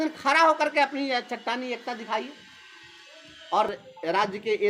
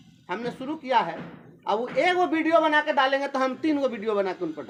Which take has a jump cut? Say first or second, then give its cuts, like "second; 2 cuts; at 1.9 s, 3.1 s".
first; 1 cut; at 3.7 s